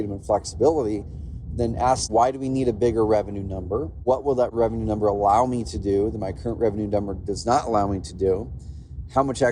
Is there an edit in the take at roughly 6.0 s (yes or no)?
no